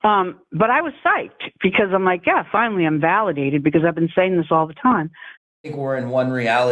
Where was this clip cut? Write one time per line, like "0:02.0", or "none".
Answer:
0:05.6